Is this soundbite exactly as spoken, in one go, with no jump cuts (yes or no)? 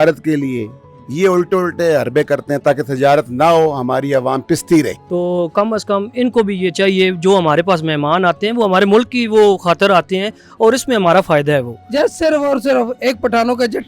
no